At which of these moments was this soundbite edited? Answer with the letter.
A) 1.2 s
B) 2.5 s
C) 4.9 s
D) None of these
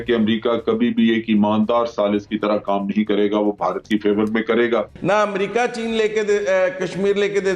C